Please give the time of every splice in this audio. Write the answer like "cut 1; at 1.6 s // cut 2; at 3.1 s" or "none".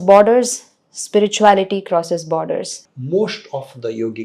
cut 1; at 2.8 s